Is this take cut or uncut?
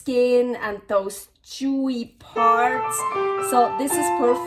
uncut